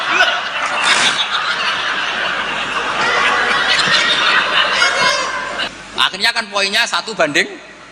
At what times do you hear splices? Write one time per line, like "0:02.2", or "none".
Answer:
0:05.7